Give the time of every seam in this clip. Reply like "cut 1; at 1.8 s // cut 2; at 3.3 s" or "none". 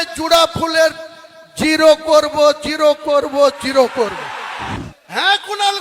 cut 1; at 4.8 s

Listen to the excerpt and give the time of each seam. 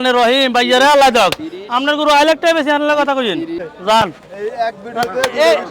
cut 1; at 3.7 s

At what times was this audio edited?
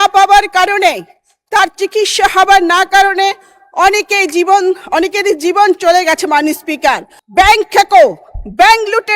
cut 1; at 7.1 s

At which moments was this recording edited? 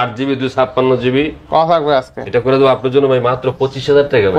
none

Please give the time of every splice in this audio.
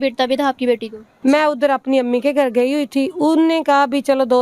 cut 1; at 1.0 s

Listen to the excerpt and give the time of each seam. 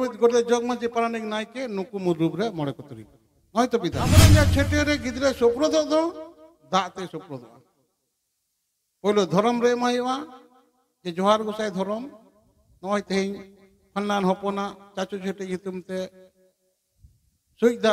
cut 1; at 4.3 s

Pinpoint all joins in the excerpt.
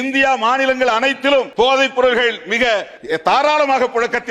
cut 1; at 1.5 s // cut 2; at 2.9 s

